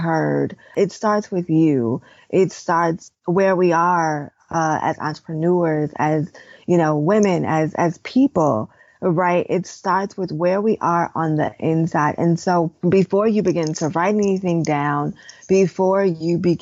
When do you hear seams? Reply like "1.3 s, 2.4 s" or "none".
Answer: none